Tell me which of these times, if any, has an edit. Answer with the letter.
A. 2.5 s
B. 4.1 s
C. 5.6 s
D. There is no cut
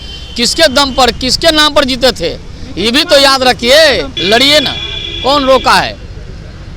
B